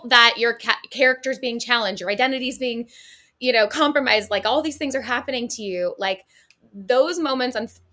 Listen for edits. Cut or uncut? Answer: uncut